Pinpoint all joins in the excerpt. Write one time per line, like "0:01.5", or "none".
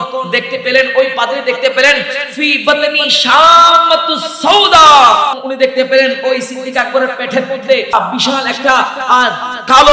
0:05.4
0:07.9